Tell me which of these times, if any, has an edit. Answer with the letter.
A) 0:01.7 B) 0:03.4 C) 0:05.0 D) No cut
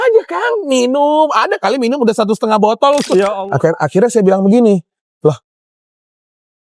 B